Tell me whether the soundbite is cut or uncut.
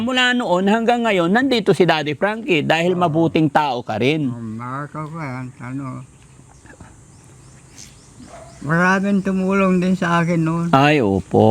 uncut